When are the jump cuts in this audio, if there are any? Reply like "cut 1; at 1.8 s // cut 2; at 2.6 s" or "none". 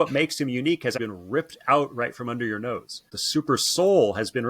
cut 1; at 0.9 s // cut 2; at 3.1 s